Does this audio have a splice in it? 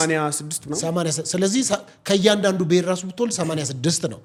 no; 0 cuts

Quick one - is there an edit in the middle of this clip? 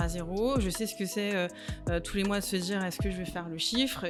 no; 0 cuts

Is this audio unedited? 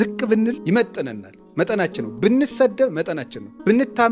yes; 0 cuts

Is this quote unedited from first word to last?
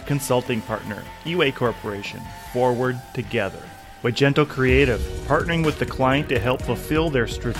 no; 1 cut; at 3.9 s

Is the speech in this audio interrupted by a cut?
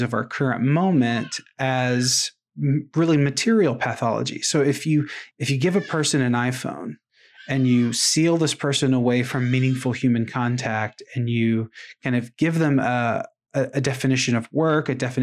yes; 1 cut; at 5.2 s

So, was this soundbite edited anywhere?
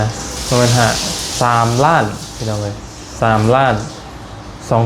no; 0 cuts

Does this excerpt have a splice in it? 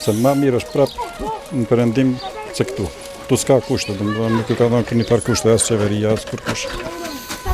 no; 0 cuts

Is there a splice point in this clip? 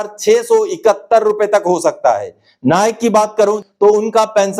yes; 1 cut; at 3.6 s

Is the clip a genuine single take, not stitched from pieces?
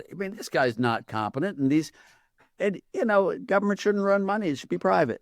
yes; 0 cuts

